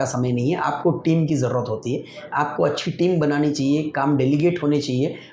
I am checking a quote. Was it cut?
no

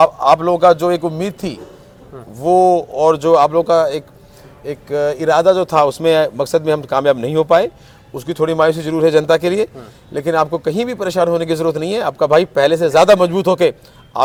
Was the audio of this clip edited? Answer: no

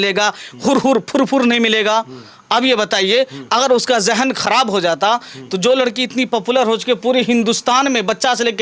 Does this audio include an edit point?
no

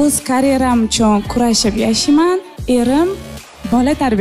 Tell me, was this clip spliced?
no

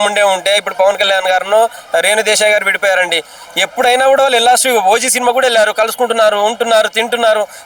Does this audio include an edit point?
no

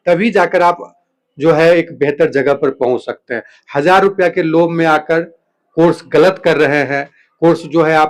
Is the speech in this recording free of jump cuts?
yes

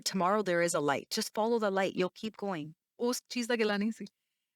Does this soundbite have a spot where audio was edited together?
yes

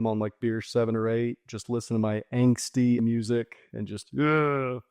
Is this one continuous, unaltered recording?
no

